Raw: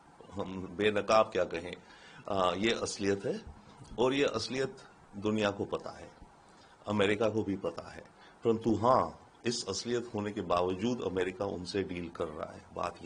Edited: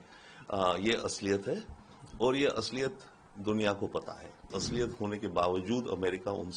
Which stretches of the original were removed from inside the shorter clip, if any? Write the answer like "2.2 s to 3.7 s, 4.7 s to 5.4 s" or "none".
6.3 s to 9.7 s